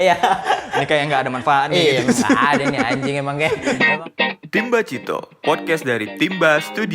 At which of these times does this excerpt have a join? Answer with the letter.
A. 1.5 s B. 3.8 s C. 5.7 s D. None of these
B